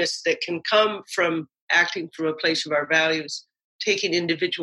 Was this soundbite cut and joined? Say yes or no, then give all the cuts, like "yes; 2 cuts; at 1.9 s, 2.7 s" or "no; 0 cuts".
no; 0 cuts